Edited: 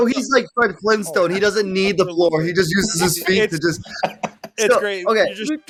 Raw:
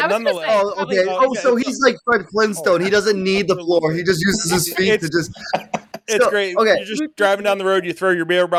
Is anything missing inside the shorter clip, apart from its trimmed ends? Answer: no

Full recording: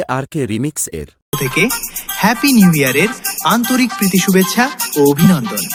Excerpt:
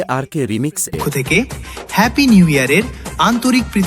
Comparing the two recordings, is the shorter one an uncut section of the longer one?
no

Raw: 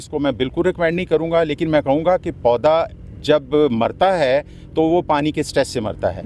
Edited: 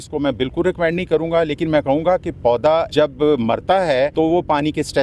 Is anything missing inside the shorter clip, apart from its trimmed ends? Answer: yes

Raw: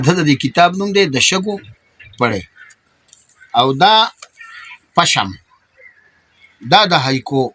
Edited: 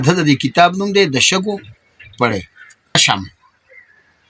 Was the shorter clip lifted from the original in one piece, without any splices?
no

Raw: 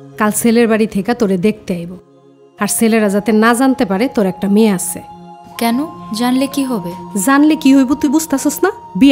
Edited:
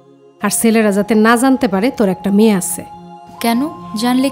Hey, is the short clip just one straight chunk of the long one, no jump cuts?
yes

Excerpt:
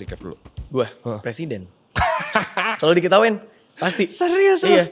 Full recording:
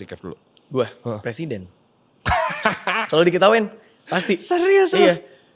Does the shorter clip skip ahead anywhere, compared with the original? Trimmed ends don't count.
yes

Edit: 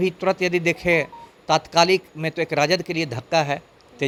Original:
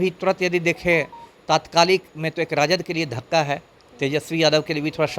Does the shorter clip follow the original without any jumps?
yes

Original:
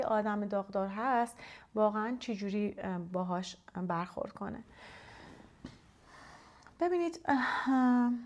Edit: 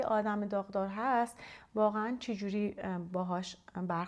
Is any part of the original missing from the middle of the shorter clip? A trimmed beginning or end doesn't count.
no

